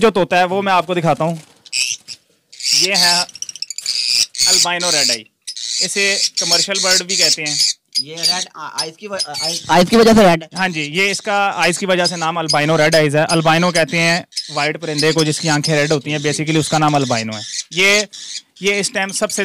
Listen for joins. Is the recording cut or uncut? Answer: uncut